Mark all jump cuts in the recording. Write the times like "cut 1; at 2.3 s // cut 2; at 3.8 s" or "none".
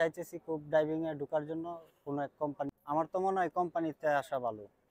cut 1; at 2.8 s

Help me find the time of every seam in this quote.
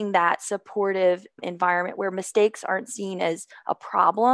cut 1; at 1.4 s

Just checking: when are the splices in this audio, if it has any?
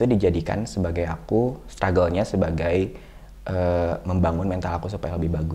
none

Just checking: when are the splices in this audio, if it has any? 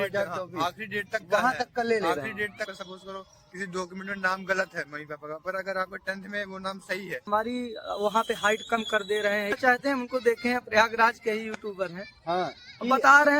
cut 1; at 2.7 s // cut 2; at 7.3 s // cut 3; at 9.5 s

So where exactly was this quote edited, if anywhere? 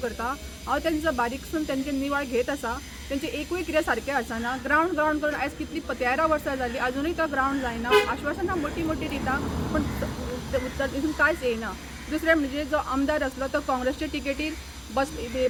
none

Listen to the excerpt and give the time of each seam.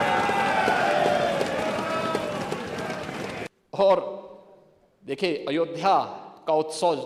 cut 1; at 3.5 s

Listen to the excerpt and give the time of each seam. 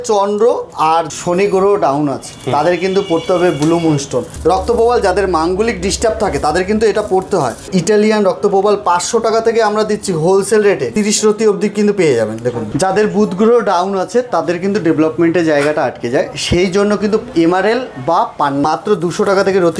cut 1; at 1.1 s // cut 2; at 4.3 s // cut 3; at 7.7 s // cut 4; at 10.9 s // cut 5; at 12.6 s // cut 6; at 18.6 s

